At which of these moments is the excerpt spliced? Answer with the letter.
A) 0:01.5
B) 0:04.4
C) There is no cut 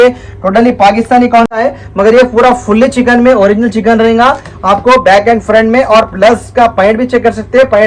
A